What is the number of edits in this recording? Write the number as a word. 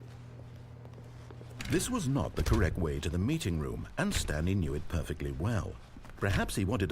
one